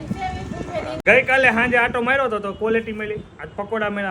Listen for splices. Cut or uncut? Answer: cut